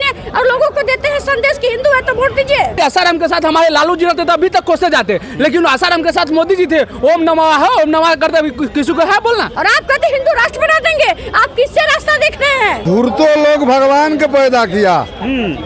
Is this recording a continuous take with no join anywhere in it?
no; 3 cuts; at 2.8 s, 9.5 s, 12.8 s

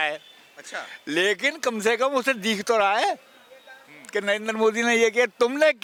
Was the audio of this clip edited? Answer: no; 0 cuts

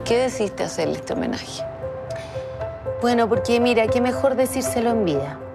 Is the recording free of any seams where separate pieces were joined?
yes; 0 cuts

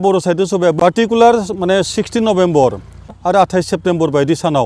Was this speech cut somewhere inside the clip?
yes; 2 cuts; at 0.9 s, 3.2 s

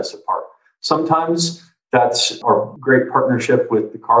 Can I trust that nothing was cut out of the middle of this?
no; 1 cut; at 2.4 s

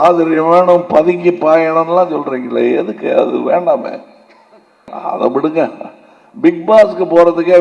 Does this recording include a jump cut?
yes; 1 cut; at 4.9 s

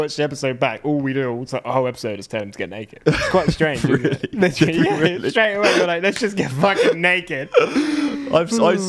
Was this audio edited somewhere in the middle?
yes; 1 cut; at 2.8 s

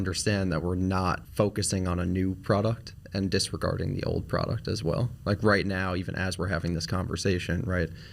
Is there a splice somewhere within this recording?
yes; 1 cut; at 1.2 s

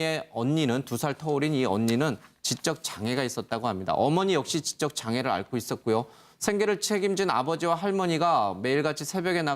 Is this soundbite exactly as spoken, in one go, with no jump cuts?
no; 1 cut; at 6.8 s

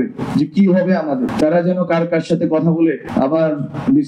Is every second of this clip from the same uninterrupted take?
no; 2 cuts; at 1.3 s, 3.0 s

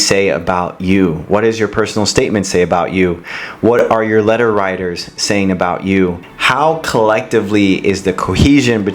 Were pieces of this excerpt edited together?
yes; 1 cut; at 6.3 s

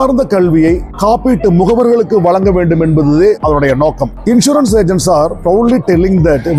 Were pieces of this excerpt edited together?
no; 0 cuts

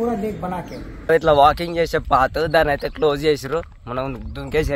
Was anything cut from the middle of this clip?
yes; 1 cut; at 1.1 s

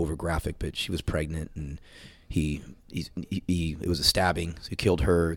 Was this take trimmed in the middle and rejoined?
no; 0 cuts

